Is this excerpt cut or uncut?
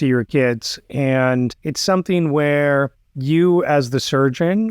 cut